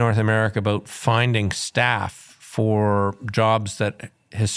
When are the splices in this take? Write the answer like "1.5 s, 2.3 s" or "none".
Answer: none

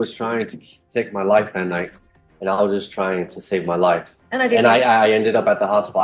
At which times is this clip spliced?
4.2 s

